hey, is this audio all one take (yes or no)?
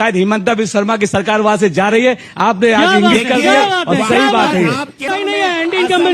no